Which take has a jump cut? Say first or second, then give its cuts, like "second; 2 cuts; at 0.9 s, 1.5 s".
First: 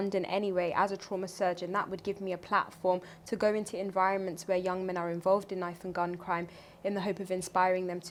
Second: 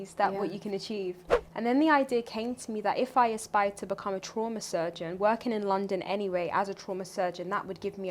second; 1 cut; at 1.3 s